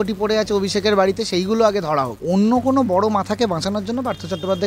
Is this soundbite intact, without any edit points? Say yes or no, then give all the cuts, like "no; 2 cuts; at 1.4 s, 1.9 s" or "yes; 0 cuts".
no; 1 cut; at 2.2 s